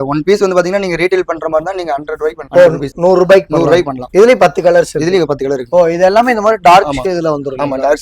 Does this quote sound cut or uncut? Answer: uncut